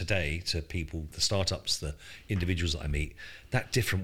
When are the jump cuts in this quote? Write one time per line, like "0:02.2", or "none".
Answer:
0:01.1